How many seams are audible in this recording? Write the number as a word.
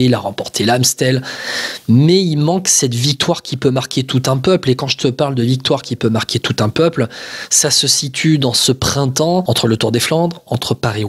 zero